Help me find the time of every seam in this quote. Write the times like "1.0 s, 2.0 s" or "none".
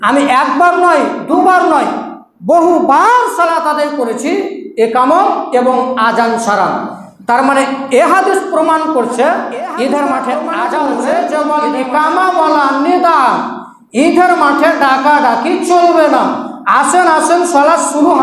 10.8 s